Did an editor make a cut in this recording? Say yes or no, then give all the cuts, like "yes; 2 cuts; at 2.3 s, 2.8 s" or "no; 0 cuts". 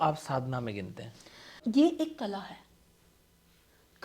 yes; 1 cut; at 1.6 s